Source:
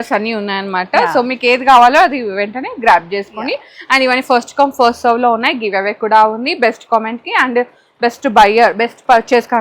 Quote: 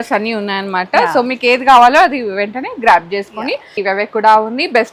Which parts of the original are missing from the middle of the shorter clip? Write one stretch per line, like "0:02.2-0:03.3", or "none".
0:03.7-0:05.6